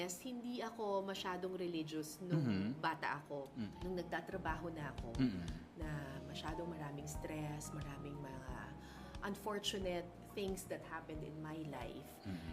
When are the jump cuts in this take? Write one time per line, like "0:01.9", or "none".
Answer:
0:03.7